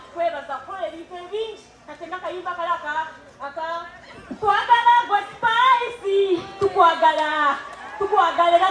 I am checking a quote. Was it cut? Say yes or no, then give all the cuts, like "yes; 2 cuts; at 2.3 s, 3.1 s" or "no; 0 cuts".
no; 0 cuts